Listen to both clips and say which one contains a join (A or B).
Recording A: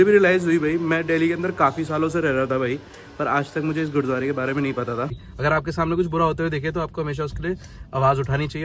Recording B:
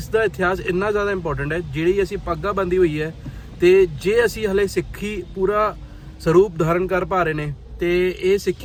A